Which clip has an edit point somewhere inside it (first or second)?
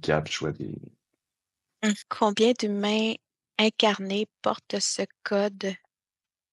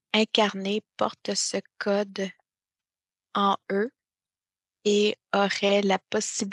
first